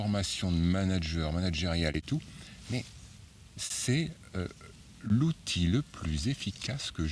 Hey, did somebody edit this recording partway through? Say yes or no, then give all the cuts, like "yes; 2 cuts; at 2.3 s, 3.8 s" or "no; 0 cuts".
no; 0 cuts